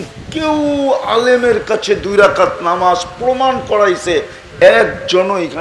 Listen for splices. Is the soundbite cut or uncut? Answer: uncut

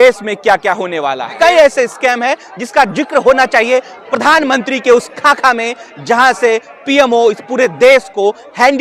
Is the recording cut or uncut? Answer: cut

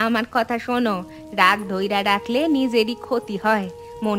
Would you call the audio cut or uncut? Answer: uncut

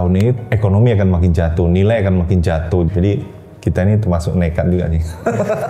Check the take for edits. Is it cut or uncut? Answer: cut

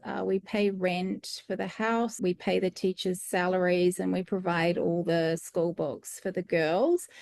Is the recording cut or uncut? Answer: cut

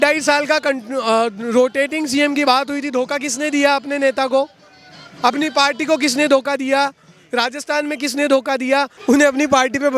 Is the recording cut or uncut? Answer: cut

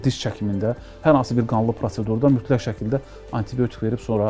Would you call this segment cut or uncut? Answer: uncut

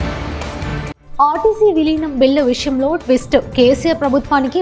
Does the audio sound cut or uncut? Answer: uncut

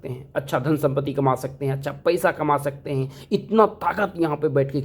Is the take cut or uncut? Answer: uncut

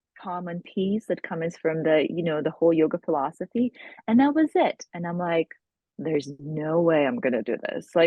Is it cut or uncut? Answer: uncut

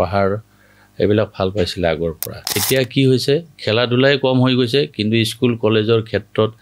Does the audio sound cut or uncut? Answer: cut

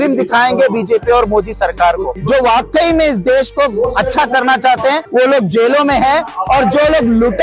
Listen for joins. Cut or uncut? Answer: cut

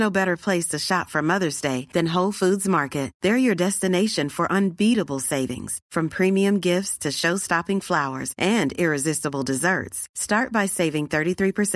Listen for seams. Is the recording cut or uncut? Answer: uncut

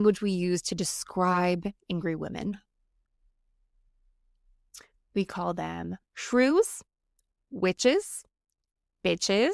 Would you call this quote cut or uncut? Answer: uncut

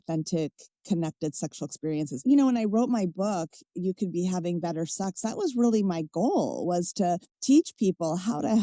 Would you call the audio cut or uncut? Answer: cut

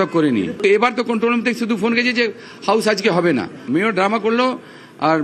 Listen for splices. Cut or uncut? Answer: uncut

